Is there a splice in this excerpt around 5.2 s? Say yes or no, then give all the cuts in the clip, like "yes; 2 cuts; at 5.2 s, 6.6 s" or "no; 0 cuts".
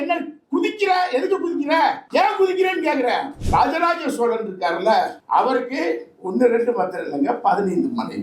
yes; 2 cuts; at 3.4 s, 5.2 s